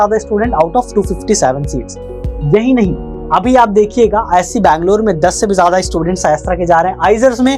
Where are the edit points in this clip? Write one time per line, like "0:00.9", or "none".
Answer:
none